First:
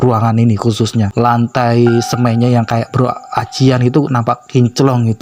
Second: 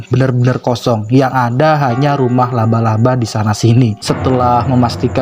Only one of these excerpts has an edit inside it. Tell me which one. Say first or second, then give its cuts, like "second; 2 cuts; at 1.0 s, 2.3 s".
second; 1 cut; at 4.0 s